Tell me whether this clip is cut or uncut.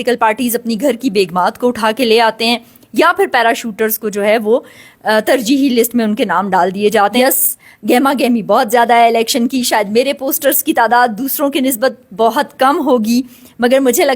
cut